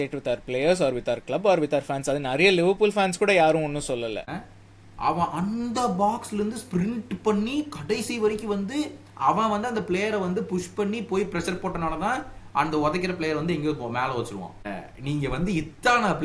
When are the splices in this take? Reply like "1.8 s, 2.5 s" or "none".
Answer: 4.3 s, 14.8 s